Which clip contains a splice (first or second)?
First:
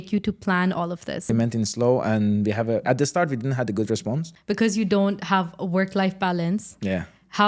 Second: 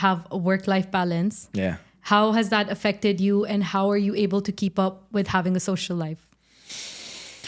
first